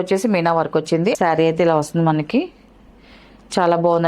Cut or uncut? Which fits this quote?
cut